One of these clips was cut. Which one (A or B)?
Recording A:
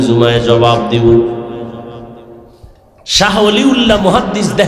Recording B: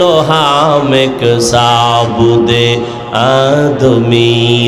A